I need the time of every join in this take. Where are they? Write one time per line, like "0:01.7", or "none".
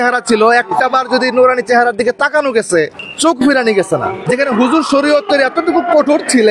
0:04.2